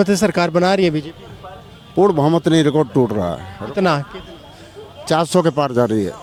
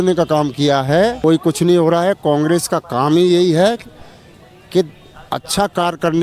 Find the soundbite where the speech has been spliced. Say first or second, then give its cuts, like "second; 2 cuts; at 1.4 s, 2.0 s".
second; 1 cut; at 1.2 s